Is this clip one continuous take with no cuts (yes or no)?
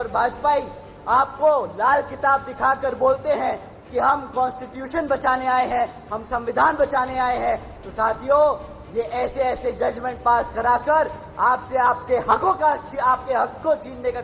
yes